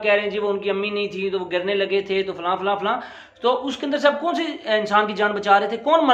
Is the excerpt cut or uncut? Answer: uncut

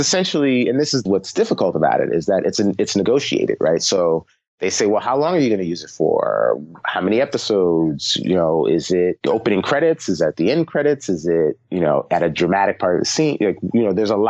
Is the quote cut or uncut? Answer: cut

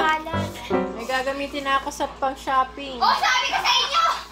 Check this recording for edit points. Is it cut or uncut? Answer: uncut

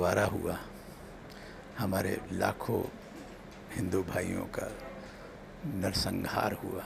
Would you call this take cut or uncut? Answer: uncut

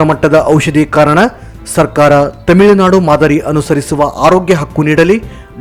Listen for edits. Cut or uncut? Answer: uncut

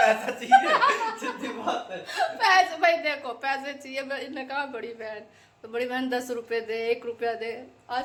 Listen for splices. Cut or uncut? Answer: uncut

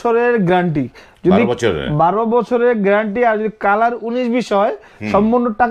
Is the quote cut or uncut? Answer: uncut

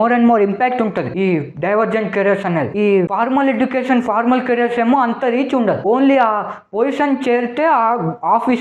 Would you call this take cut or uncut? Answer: uncut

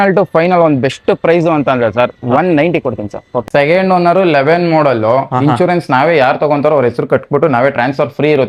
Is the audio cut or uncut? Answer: cut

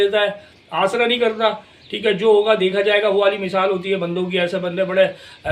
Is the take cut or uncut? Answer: uncut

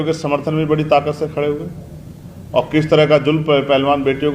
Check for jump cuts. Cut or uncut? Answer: uncut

